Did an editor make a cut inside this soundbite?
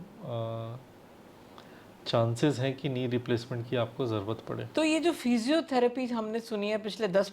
yes; 1 cut; at 4.6 s

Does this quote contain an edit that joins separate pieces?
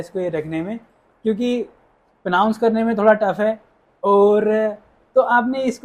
no; 0 cuts

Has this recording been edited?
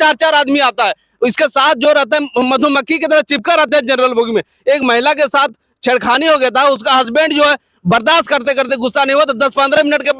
no; 0 cuts

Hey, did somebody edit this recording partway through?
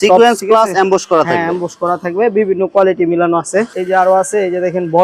no; 0 cuts

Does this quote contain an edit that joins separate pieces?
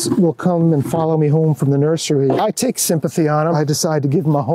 yes; 2 cuts; at 2.4 s, 3.5 s

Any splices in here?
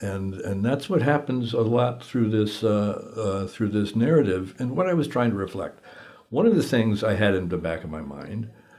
no; 0 cuts

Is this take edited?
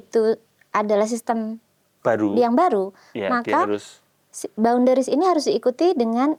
no; 0 cuts

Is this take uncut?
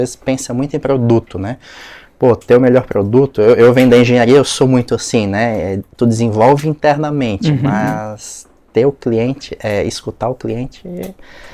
yes; 0 cuts

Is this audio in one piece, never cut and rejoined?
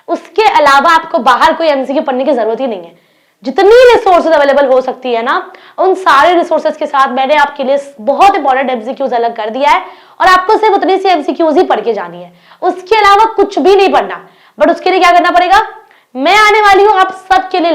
yes; 0 cuts

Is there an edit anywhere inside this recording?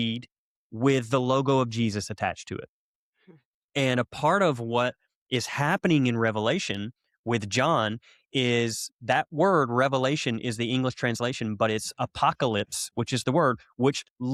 no; 0 cuts

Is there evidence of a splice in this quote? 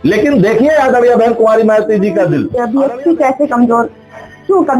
yes; 1 cut; at 2.5 s

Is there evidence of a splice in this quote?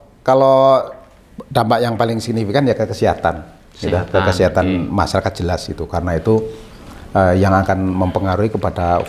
no; 0 cuts

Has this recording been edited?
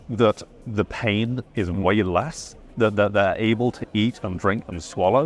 no; 0 cuts

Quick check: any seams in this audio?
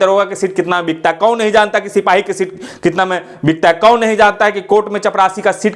no; 0 cuts

